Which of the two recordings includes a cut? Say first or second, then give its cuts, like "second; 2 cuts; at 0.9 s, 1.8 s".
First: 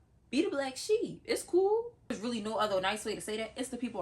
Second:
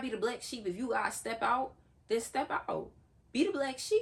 first; 1 cut; at 2.2 s